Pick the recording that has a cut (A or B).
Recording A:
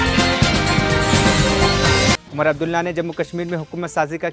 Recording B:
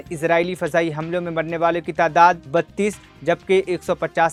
A